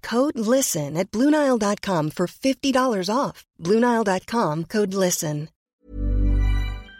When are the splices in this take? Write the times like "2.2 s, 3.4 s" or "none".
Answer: 5.7 s